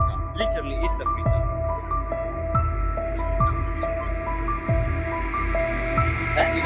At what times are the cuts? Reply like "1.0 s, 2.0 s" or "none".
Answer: none

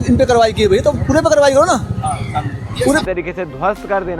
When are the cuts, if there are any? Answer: 3.0 s

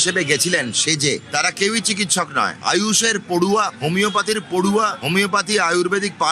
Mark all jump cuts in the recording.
none

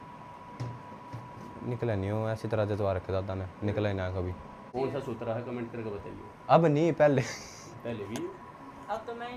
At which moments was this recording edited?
4.6 s

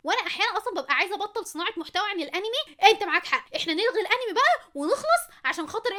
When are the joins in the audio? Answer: none

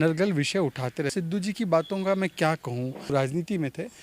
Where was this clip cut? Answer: 1.1 s, 3.1 s

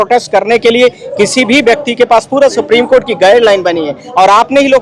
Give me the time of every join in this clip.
none

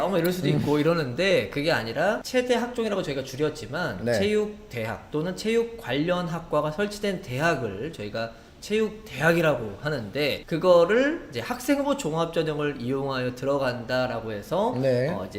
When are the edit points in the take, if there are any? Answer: none

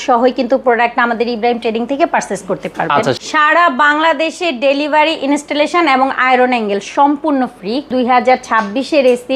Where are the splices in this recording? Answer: 3.2 s, 7.9 s

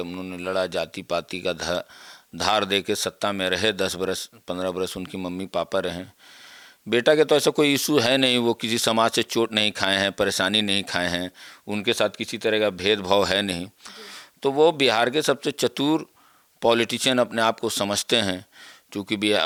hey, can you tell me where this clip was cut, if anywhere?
none

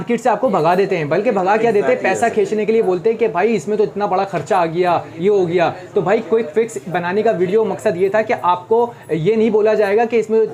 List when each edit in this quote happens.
none

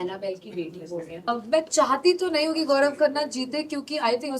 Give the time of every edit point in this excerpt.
1.3 s

